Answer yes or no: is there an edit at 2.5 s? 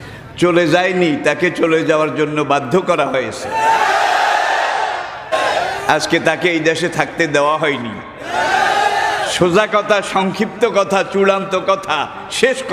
no